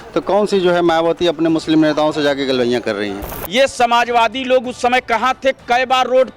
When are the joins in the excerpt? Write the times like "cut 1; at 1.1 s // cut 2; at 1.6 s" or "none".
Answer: cut 1; at 3.4 s